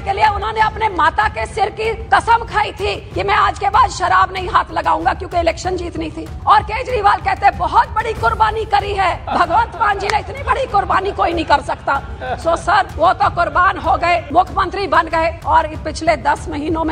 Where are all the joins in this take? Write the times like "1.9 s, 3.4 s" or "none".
2.0 s, 3.1 s, 6.2 s, 9.2 s, 12.9 s, 14.3 s, 15.4 s